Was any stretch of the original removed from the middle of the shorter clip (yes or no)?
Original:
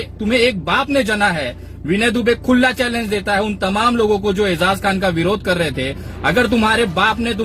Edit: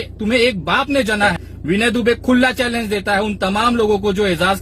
yes